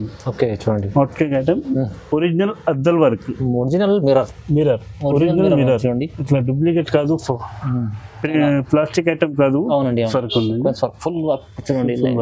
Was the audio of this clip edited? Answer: yes; 1 cut; at 10.1 s

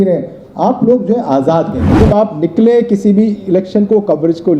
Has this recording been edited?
yes; 1 cut; at 2.0 s

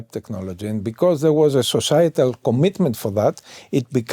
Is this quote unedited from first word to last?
yes; 0 cuts

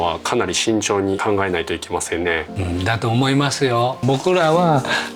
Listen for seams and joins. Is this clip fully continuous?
no; 3 cuts; at 1.2 s, 2.5 s, 4.0 s

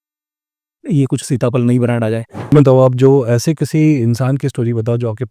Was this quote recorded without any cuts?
no; 1 cut; at 2.5 s

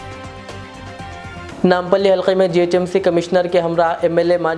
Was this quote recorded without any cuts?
yes; 0 cuts

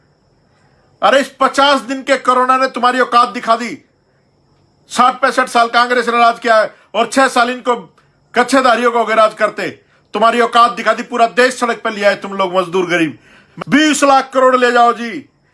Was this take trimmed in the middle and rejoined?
yes; 1 cut; at 13.4 s

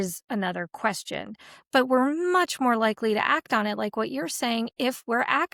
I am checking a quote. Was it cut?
no; 0 cuts

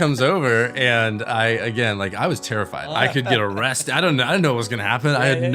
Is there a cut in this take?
yes; 1 cut; at 2.9 s

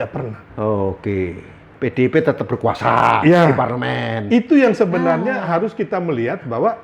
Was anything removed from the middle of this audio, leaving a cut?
yes; 1 cut; at 1.7 s

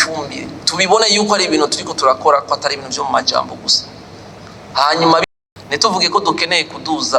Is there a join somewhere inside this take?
yes; 1 cut; at 5.3 s

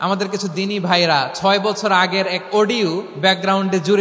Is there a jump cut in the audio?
no; 0 cuts

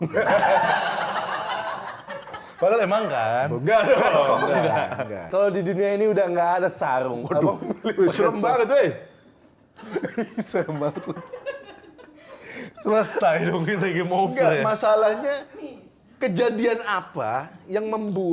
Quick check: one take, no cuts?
no; 1 cut; at 5.3 s

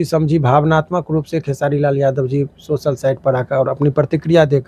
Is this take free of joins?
yes; 0 cuts

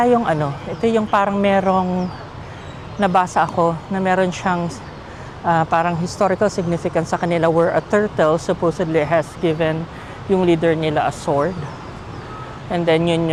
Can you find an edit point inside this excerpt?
no; 0 cuts

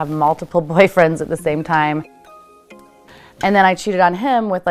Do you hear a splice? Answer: no; 0 cuts

